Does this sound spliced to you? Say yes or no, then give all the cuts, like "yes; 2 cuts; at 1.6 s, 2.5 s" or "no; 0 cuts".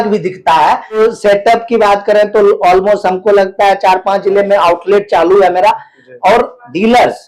yes; 1 cut; at 1.0 s